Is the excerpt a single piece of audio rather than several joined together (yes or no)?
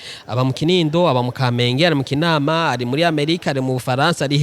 yes